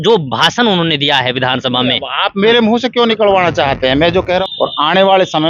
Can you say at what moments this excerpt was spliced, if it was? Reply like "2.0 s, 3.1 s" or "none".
4.4 s